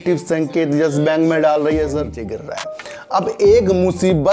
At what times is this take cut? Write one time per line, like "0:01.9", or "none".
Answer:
0:01.9